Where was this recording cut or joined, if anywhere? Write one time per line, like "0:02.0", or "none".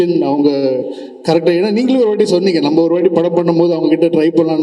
none